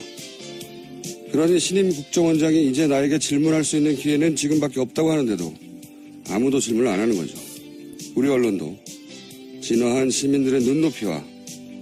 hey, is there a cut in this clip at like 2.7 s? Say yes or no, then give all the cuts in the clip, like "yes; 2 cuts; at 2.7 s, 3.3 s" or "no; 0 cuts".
yes; 1 cut; at 2.7 s